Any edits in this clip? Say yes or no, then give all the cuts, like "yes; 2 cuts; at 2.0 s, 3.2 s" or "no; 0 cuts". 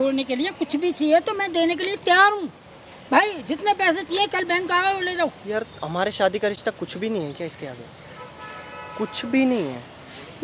no; 0 cuts